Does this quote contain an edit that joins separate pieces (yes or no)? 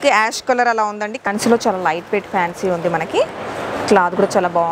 yes